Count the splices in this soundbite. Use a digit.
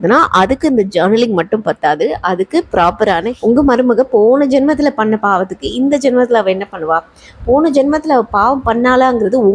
1